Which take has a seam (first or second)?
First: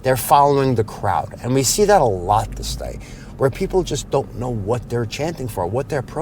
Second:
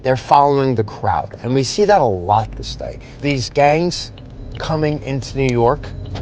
second